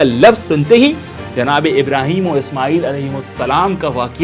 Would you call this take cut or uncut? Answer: uncut